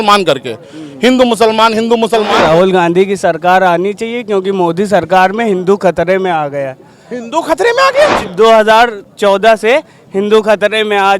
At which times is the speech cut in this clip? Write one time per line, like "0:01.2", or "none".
0:02.3
0:08.2